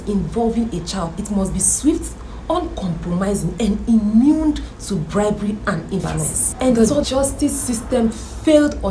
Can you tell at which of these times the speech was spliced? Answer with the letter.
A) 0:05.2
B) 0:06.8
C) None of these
B